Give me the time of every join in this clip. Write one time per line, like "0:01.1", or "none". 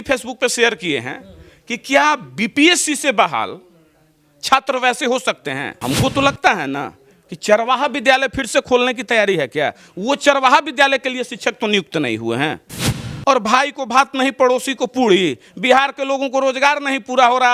0:05.7